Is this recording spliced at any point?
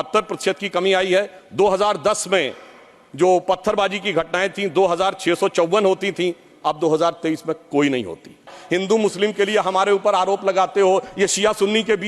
yes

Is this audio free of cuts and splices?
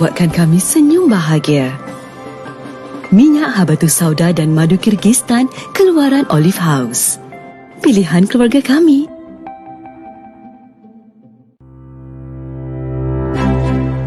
no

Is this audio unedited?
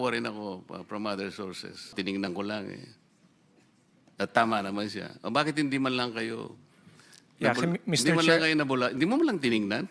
no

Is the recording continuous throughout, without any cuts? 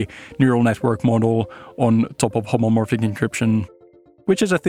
yes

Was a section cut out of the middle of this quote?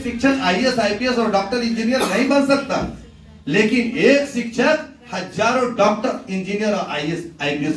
no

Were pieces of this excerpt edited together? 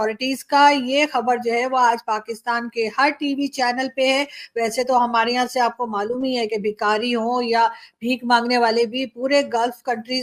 no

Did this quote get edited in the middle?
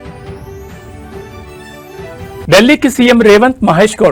no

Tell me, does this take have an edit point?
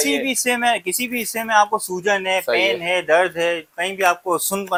no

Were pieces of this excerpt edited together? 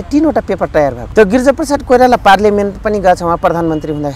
yes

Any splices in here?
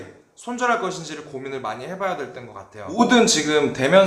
yes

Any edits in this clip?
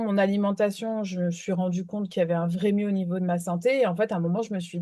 no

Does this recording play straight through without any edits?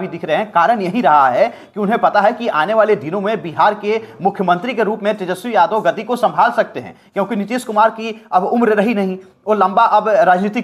yes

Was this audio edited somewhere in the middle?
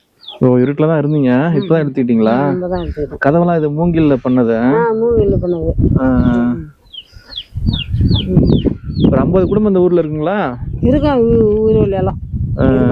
no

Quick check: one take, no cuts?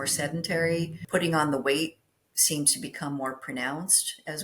no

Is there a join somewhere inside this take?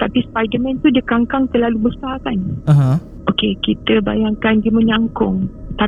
no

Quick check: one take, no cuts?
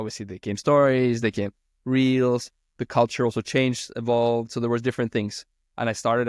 yes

